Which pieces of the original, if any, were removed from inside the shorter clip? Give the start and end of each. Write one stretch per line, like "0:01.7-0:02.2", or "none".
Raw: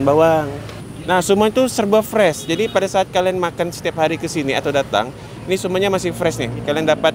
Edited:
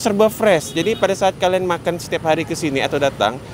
none

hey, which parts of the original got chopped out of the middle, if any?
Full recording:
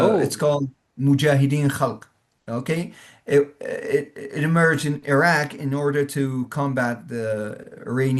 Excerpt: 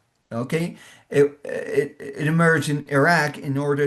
none

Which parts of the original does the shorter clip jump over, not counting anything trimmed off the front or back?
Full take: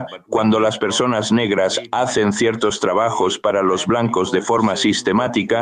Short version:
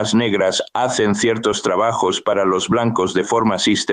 none

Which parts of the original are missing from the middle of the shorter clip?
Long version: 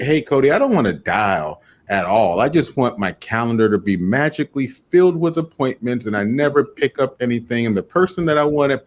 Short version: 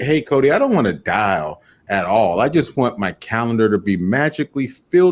none

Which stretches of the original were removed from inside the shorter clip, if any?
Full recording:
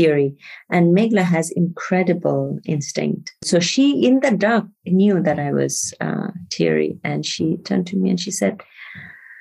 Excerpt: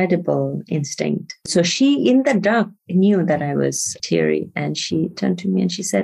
0:05.9-0:06.4

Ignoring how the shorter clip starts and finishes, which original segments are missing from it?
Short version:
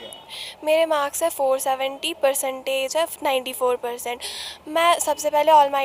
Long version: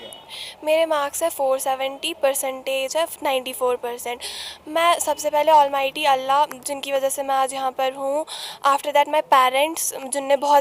none

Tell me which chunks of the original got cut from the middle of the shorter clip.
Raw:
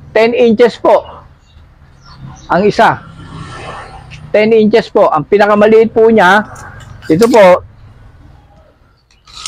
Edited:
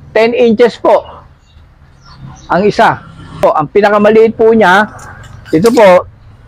0:03.4-0:05.0

